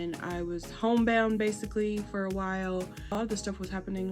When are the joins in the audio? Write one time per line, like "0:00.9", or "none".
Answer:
0:03.2